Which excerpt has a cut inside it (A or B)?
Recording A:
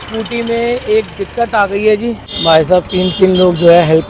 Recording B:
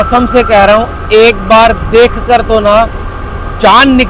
A